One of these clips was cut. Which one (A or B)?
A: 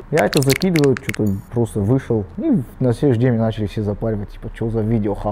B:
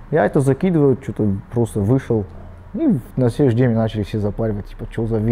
A